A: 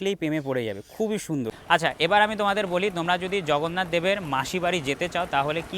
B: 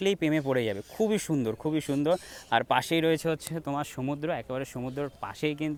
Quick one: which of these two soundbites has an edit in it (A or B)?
A